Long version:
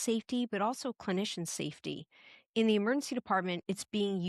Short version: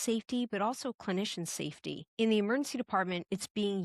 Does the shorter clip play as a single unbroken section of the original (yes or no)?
no